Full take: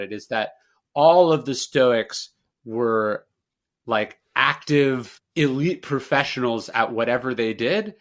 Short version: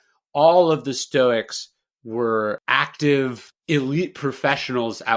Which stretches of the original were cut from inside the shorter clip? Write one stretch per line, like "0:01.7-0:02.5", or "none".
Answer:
0:03.2-0:04.3